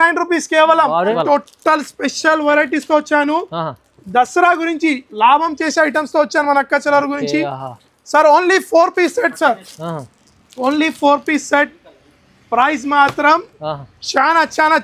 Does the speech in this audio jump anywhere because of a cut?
yes; 1 cut; at 1.1 s

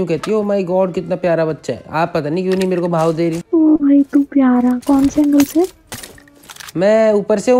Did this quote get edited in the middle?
yes; 1 cut; at 3.4 s

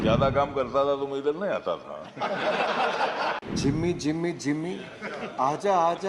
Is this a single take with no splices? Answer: no; 1 cut; at 3.4 s

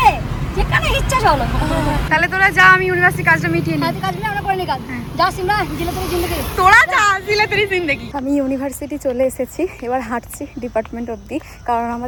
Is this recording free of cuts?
yes; 0 cuts

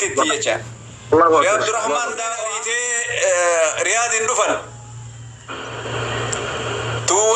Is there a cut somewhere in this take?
yes; 1 cut; at 2.5 s

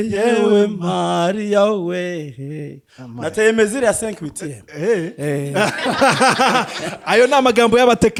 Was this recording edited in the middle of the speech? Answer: no; 0 cuts

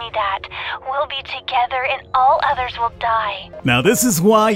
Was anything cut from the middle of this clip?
yes; 1 cut; at 3.5 s

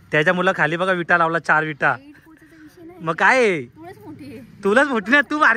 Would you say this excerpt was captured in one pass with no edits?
yes; 0 cuts

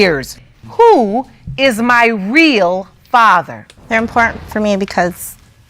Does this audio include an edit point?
yes; 1 cut; at 3.7 s

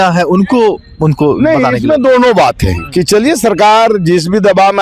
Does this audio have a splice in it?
no; 0 cuts

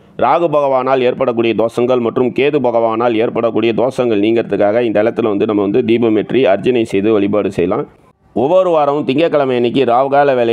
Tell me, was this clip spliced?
yes; 1 cut; at 8.5 s

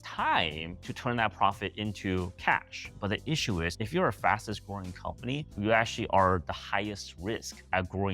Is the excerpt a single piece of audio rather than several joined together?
no; 1 cut; at 2.9 s

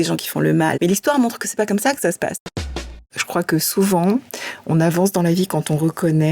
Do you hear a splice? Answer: yes; 2 cuts; at 0.8 s, 2.9 s

